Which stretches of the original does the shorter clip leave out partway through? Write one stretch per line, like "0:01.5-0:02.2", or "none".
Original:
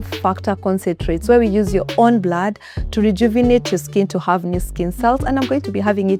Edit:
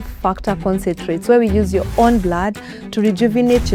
none